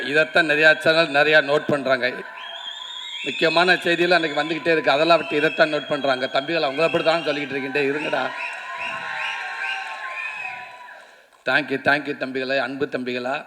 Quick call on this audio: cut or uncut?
uncut